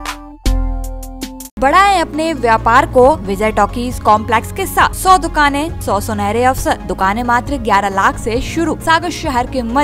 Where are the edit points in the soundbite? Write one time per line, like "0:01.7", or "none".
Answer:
0:01.6
0:03.3
0:05.0
0:05.8
0:06.9
0:08.8

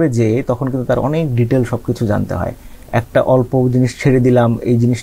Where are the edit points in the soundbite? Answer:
none

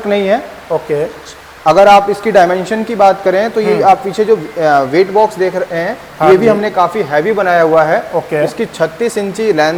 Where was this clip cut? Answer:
none

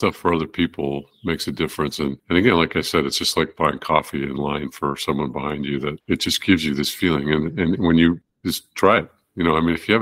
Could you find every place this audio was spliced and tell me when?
0:02.2
0:06.0
0:08.3

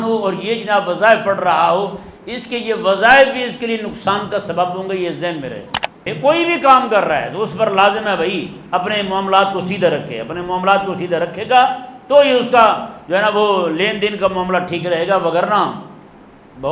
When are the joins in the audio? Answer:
0:06.1

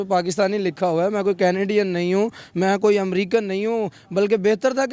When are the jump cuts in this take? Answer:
none

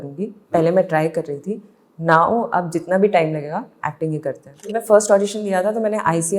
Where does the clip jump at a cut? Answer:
0:04.7

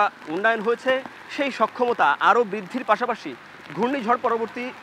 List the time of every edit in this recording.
none

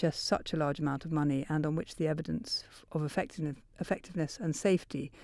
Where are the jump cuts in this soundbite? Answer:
none

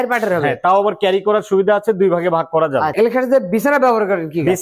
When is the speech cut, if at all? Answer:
0:02.9

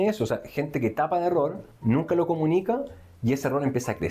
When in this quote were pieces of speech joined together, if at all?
0:01.7

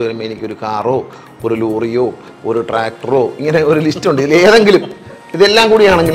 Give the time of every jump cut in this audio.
none

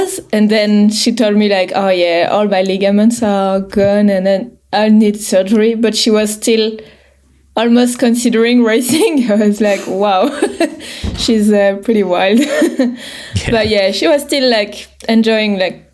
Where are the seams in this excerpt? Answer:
none

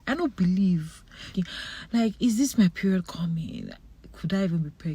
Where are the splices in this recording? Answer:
0:01.4

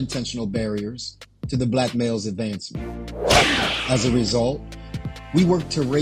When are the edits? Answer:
none

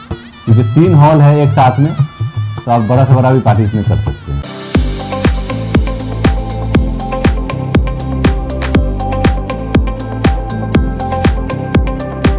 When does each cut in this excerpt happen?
0:04.4

